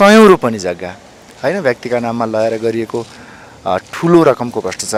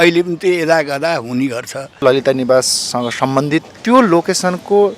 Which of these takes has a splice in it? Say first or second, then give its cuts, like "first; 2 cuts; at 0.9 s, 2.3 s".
second; 2 cuts; at 2.0 s, 3.7 s